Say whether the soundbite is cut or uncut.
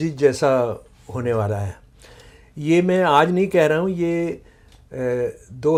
uncut